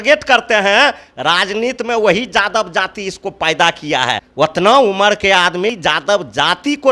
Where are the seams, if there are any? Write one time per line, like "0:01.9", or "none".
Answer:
0:04.2
0:05.8